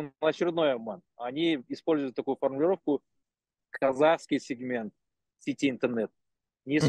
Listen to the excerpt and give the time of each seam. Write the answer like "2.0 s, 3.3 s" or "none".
none